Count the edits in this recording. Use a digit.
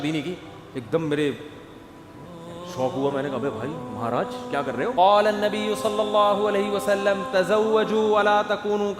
1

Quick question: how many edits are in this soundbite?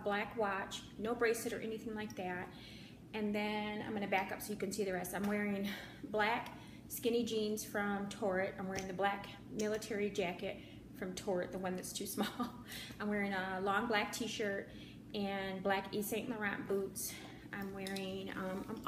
1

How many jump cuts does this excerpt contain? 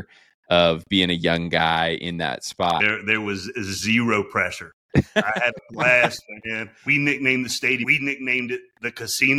3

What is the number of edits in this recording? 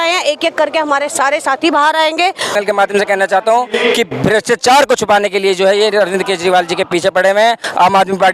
1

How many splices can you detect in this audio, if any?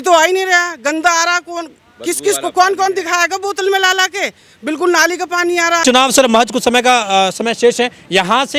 1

